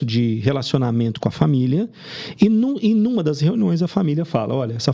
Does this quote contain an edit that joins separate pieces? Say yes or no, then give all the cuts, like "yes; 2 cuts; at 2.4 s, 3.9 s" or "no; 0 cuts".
no; 0 cuts